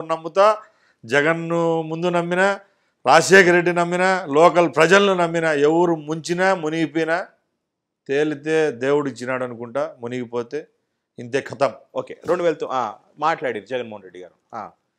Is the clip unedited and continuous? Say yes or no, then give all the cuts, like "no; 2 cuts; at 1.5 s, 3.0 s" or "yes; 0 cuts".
yes; 0 cuts